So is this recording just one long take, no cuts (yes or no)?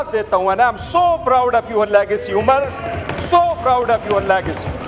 yes